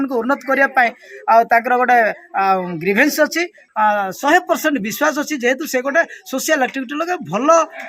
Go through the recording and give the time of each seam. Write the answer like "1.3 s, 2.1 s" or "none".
3.6 s